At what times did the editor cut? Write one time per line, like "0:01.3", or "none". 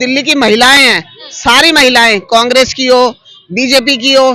none

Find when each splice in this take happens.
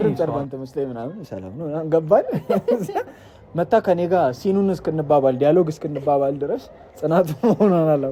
none

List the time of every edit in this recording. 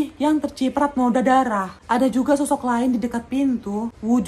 0:01.7

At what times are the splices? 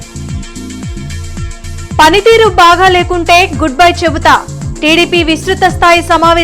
0:01.0

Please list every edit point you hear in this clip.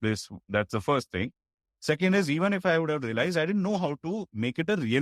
none

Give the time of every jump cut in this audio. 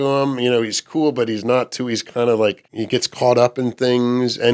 0:02.7

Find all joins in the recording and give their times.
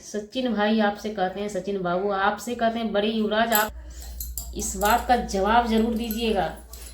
0:03.8

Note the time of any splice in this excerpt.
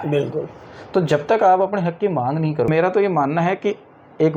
0:02.7

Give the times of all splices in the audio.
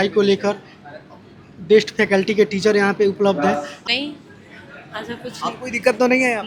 0:03.7

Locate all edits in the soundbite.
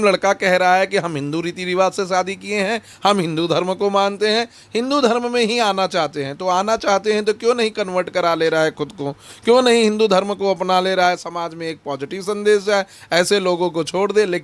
none

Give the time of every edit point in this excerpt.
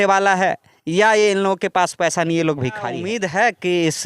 0:03.0

